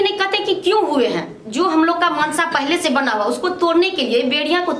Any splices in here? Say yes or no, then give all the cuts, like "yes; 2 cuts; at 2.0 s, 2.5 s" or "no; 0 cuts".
no; 0 cuts